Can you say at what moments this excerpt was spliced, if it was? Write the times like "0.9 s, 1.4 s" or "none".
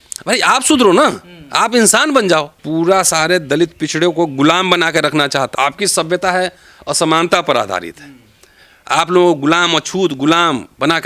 2.6 s, 5.5 s

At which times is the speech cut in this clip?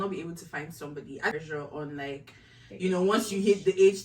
1.3 s

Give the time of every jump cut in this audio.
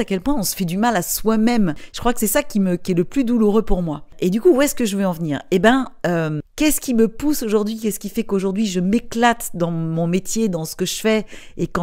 none

